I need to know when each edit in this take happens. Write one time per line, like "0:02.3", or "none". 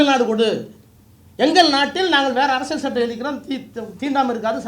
none